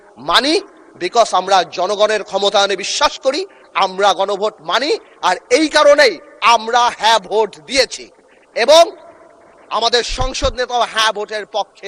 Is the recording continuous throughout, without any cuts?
yes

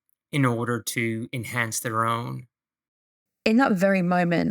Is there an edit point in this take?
yes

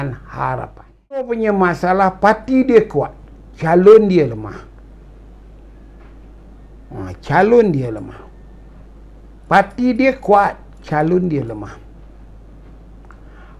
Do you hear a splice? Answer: yes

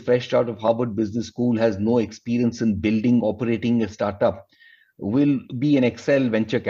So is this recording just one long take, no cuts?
yes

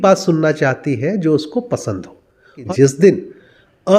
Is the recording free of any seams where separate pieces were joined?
no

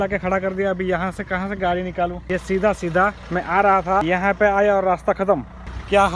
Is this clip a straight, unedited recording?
no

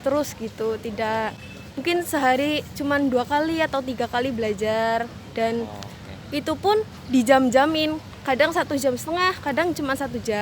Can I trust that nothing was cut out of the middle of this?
yes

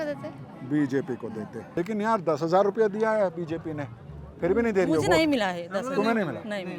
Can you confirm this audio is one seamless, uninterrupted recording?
no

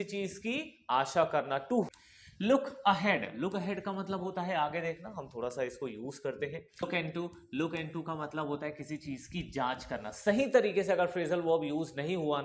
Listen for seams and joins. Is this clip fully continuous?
no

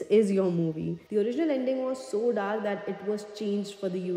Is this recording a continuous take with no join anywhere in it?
no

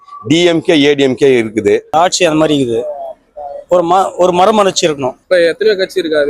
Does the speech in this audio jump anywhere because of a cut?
yes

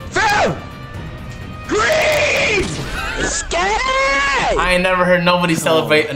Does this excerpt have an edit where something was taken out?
no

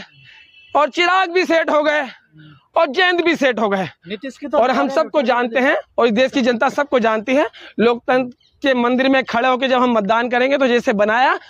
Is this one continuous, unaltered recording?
yes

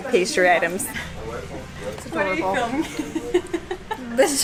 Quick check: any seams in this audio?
no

